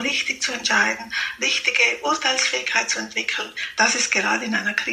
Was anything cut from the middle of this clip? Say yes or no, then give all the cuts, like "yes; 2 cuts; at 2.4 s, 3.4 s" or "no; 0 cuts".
no; 0 cuts